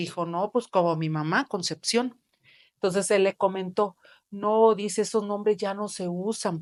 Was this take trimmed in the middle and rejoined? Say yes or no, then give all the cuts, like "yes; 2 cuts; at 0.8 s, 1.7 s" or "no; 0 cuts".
no; 0 cuts